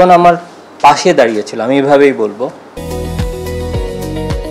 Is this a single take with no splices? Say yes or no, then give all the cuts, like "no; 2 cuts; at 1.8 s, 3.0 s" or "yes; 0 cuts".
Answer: no; 1 cut; at 2.9 s